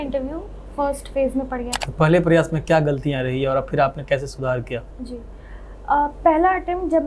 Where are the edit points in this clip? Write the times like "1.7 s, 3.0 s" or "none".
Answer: 1.8 s